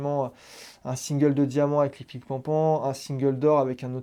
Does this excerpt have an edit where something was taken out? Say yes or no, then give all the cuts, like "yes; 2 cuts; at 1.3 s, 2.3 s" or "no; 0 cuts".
no; 0 cuts